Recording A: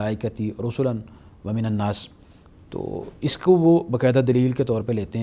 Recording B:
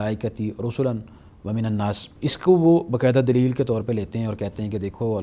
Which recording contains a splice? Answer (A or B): B